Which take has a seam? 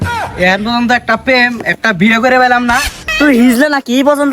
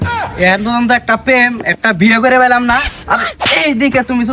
first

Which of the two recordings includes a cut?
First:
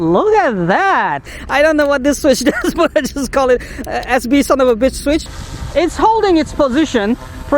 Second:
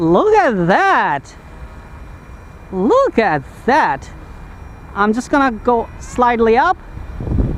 first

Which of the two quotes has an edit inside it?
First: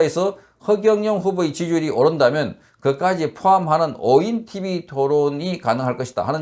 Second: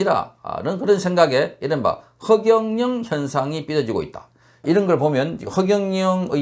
second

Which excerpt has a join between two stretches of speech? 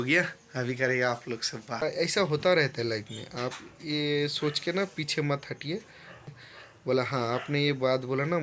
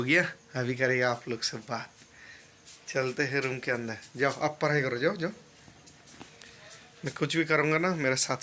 first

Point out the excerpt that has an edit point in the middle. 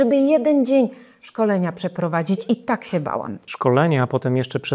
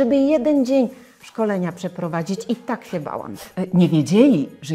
second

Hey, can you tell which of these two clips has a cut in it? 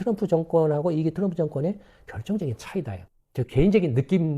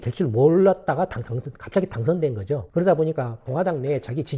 first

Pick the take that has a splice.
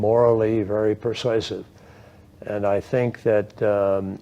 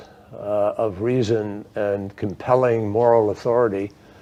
first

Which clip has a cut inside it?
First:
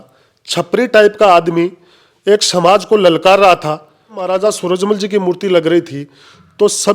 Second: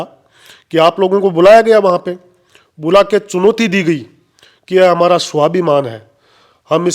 first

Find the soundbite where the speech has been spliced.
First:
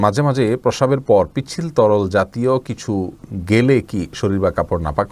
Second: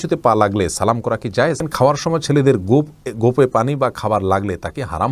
second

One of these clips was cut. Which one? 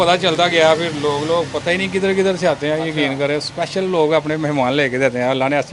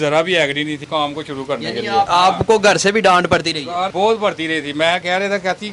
second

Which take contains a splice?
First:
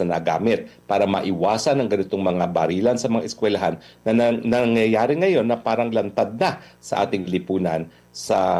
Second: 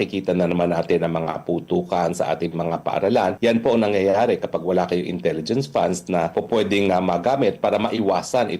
second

